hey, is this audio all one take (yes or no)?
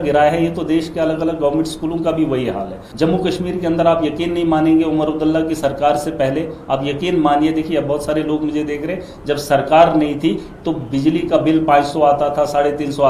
no